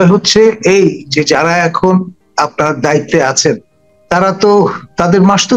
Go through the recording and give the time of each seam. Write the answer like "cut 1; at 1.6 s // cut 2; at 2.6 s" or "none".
none